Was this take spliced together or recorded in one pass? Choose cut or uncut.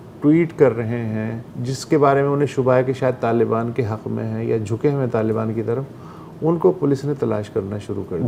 uncut